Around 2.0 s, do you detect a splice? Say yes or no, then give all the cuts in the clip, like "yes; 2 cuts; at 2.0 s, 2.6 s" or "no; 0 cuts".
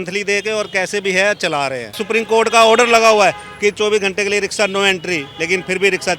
yes; 1 cut; at 2.0 s